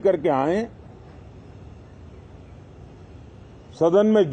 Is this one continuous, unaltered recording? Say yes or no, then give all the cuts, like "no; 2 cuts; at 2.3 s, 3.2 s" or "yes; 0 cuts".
yes; 0 cuts